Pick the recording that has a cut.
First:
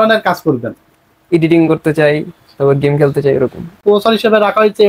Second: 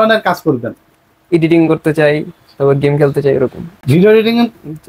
first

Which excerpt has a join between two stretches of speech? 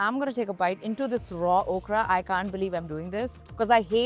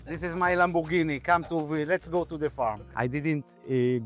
second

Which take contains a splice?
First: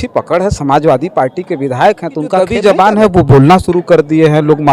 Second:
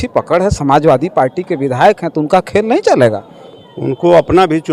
first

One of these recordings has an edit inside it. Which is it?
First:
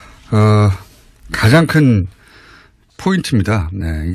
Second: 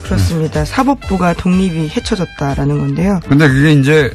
second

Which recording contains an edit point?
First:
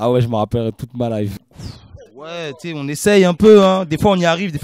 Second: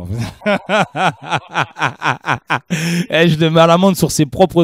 first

